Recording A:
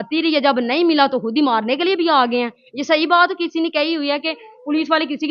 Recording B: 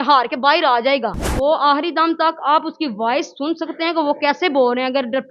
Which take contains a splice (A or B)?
B